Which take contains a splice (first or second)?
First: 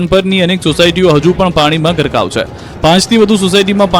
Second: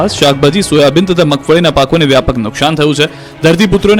first